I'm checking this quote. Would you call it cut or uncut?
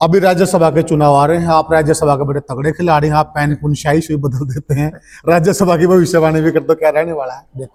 uncut